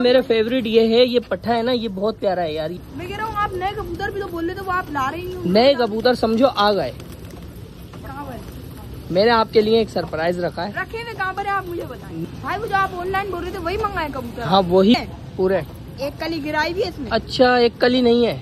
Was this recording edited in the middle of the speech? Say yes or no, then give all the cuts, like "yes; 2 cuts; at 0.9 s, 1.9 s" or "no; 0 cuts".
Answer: yes; 3 cuts; at 2.7 s, 12.2 s, 14.9 s